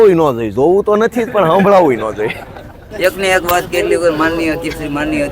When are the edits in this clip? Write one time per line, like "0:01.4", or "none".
0:02.8